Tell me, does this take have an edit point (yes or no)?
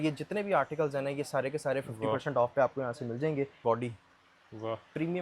yes